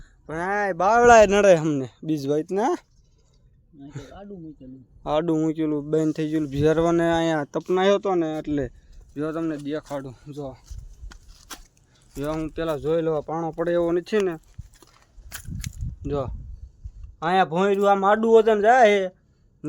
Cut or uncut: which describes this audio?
uncut